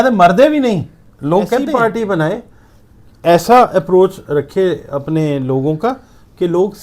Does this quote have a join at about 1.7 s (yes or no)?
yes